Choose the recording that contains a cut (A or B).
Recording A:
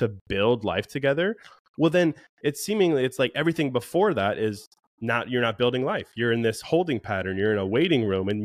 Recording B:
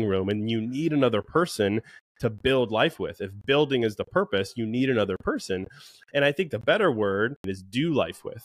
B